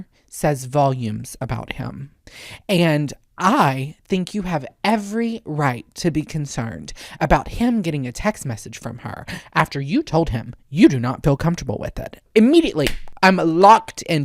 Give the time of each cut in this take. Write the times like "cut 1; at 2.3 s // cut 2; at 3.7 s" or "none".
cut 1; at 13.0 s